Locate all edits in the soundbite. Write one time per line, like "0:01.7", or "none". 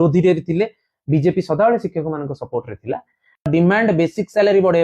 0:03.4